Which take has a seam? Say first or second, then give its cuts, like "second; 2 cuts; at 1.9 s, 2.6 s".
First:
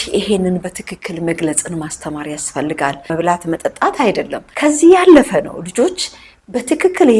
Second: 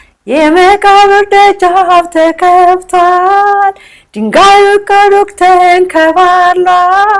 first; 2 cuts; at 3.1 s, 4.4 s